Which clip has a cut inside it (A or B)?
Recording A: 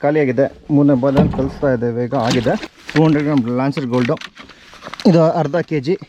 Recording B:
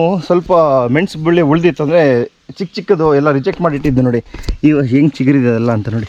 A